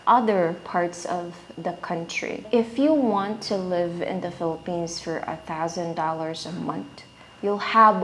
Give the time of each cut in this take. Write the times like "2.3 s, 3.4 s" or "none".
2.4 s